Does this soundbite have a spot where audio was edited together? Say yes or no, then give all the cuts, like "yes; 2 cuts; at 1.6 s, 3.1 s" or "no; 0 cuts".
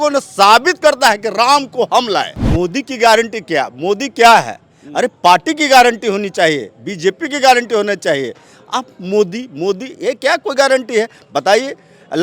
yes; 1 cut; at 2.4 s